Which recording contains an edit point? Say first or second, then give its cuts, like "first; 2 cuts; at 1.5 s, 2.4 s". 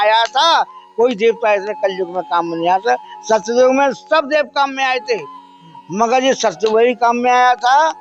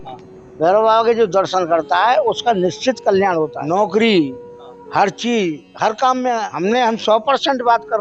second; 2 cuts; at 3.6 s, 6.5 s